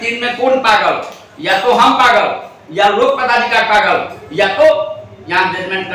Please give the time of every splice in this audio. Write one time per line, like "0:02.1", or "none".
none